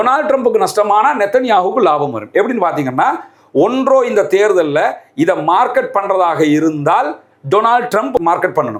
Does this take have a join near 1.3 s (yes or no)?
no